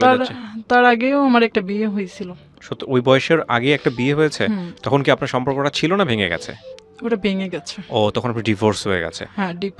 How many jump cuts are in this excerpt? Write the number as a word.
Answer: zero